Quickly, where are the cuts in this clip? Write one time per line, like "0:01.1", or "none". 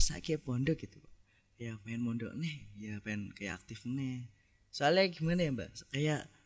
none